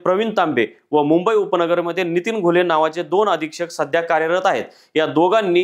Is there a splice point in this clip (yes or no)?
no